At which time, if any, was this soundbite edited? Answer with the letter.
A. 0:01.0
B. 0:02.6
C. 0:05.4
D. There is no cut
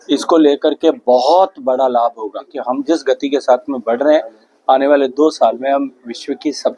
B